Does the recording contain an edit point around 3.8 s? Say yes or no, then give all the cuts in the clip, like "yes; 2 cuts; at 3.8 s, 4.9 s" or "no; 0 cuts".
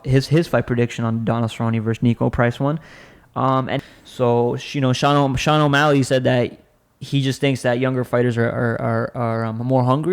yes; 1 cut; at 3.8 s